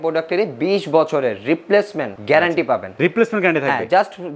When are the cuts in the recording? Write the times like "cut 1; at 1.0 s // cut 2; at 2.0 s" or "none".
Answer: none